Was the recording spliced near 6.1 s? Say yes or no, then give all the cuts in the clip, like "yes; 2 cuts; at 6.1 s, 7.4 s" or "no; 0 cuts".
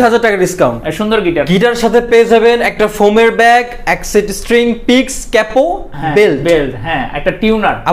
no; 1 cut; at 1.5 s